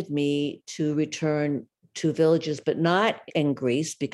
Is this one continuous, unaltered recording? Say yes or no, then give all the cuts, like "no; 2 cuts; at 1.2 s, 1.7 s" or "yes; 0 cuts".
yes; 0 cuts